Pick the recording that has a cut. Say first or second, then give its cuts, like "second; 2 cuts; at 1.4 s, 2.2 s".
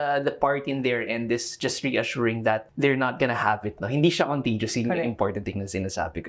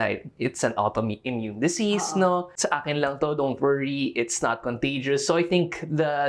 second; 1 cut; at 2.5 s